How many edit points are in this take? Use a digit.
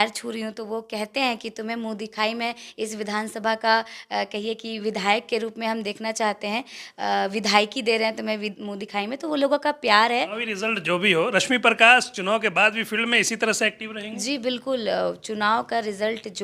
1